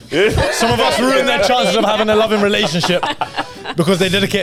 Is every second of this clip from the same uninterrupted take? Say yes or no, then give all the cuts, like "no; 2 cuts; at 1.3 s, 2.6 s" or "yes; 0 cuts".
yes; 0 cuts